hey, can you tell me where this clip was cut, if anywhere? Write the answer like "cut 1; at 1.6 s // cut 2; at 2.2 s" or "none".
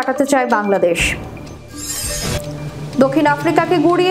cut 1; at 3.0 s